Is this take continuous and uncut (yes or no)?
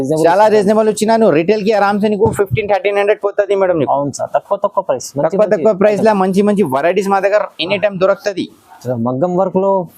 yes